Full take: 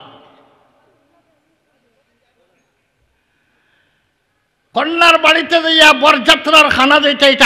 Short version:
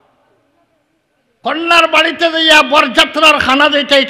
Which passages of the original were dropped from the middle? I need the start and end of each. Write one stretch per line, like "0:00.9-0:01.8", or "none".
0:01.9-0:04.6